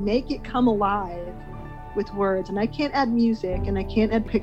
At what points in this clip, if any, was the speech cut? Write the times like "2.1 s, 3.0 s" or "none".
none